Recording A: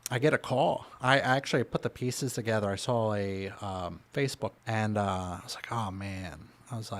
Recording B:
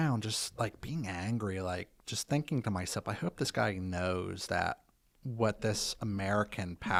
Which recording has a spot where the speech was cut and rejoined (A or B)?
A